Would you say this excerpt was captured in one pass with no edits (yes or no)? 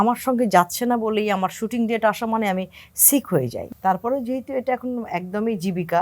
no